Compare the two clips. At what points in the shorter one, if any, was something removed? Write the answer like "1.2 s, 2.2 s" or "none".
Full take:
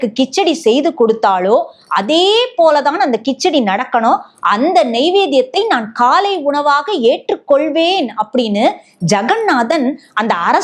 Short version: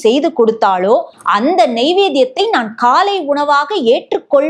1.2 s